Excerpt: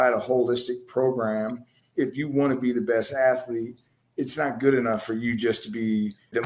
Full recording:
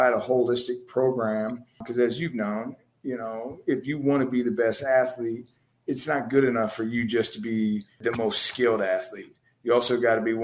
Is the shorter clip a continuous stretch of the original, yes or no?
no